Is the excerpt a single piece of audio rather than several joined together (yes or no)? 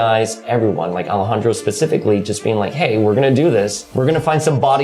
no